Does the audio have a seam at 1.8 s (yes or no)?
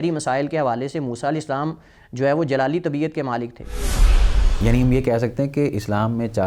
no